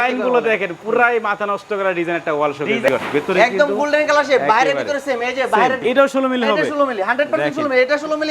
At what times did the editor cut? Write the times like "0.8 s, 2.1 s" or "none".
2.9 s, 5.8 s